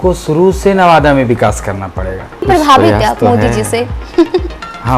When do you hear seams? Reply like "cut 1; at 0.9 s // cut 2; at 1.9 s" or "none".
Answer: cut 1; at 2.5 s